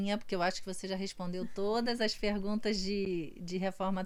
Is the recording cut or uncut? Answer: uncut